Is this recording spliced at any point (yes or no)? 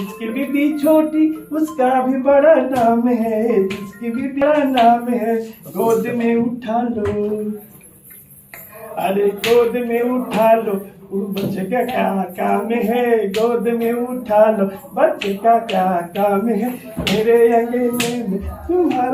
no